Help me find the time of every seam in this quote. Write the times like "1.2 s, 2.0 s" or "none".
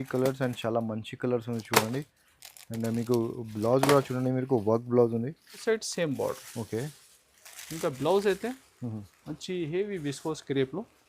5.6 s